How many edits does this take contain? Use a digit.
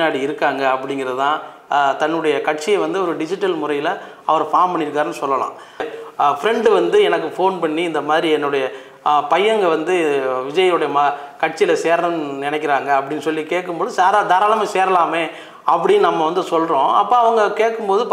2